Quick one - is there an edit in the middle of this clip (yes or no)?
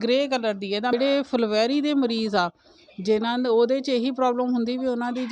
yes